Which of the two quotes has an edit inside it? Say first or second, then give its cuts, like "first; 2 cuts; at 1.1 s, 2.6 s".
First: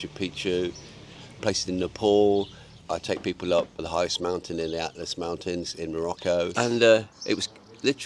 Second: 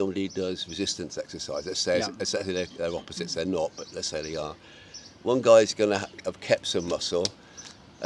first; 4 cuts; at 1.4 s, 2.7 s, 3.8 s, 6.5 s